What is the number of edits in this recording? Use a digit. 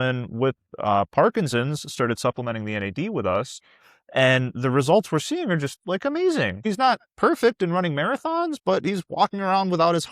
1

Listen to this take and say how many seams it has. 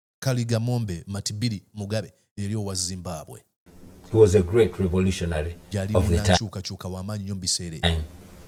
0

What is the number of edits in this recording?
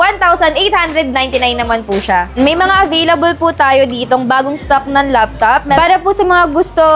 2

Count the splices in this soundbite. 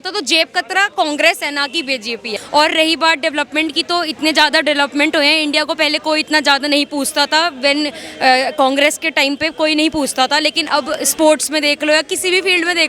1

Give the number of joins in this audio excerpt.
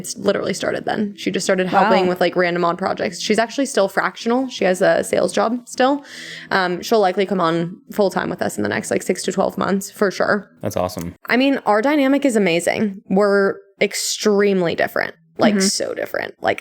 0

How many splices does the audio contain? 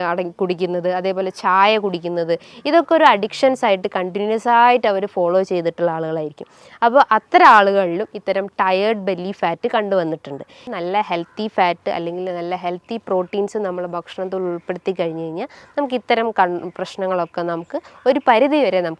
1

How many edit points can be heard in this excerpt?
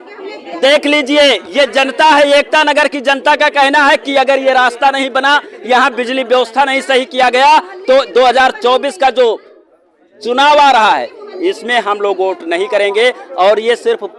0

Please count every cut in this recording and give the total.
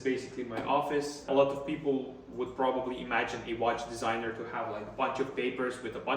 1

